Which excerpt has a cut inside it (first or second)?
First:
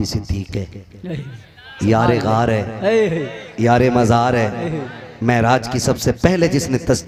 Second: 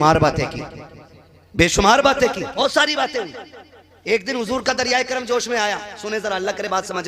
second